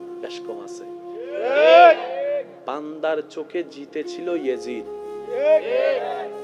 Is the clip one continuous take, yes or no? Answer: no